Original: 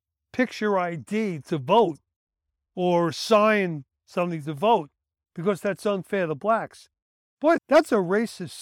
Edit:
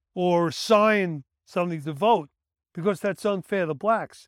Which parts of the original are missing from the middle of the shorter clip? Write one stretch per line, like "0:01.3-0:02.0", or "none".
none